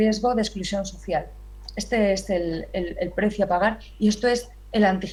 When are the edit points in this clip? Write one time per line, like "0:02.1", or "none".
none